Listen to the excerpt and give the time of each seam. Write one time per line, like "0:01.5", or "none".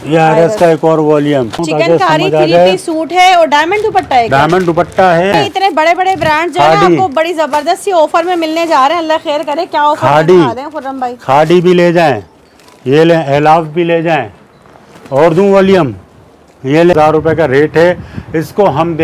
0:01.6
0:05.3
0:16.9